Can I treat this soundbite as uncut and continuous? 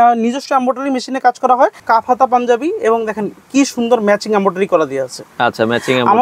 no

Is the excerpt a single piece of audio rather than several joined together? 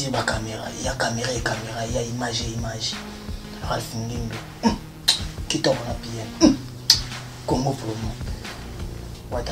yes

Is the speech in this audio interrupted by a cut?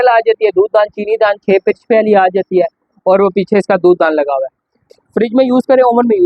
yes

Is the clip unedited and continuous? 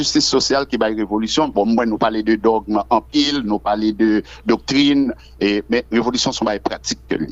yes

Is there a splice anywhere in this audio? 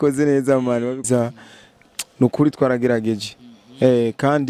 yes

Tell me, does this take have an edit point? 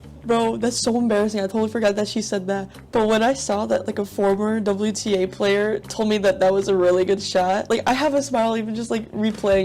yes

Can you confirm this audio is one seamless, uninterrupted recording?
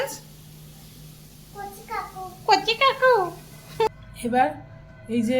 no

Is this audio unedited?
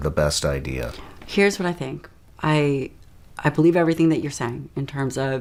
yes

